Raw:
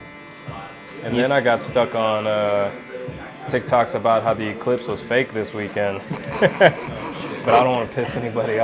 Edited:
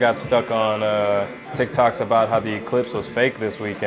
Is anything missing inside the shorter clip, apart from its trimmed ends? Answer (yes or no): yes